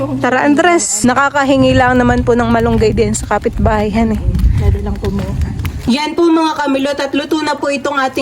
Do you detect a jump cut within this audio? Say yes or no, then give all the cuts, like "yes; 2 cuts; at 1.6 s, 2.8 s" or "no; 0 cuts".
yes; 2 cuts; at 0.9 s, 5.9 s